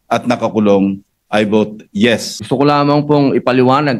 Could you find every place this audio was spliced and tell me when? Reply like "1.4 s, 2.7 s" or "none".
2.3 s